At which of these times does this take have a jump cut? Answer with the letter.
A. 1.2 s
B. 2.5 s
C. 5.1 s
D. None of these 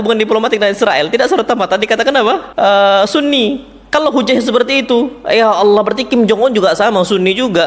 B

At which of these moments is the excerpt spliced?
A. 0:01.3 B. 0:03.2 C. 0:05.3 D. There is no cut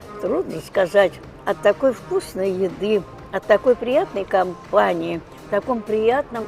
D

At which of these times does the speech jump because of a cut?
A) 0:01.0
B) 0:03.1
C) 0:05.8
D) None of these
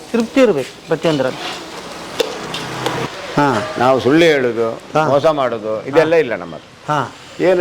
B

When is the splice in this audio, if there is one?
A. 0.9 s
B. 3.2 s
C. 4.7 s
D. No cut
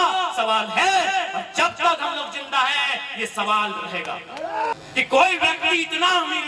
C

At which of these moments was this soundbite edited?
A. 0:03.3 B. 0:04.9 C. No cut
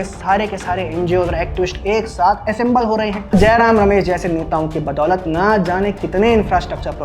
A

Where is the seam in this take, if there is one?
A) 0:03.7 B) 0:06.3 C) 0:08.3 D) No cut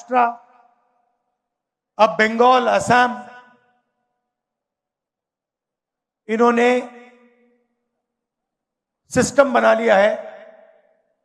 D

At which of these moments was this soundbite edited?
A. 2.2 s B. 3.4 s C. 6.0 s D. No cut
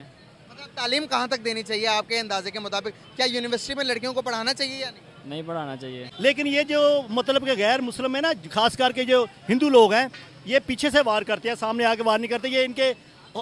C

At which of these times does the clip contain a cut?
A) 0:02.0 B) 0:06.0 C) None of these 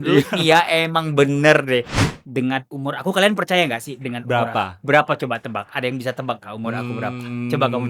A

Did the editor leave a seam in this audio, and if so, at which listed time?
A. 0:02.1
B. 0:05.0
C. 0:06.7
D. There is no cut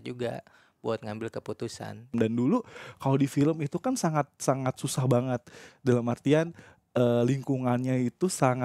A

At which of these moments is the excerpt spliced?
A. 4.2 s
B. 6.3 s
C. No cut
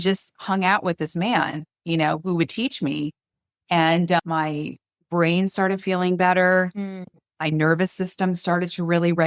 A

